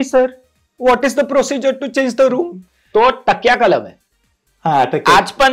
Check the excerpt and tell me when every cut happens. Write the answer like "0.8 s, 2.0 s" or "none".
none